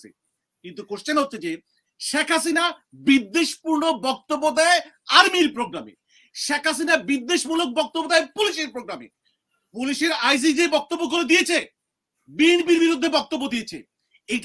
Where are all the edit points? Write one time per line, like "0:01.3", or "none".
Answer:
none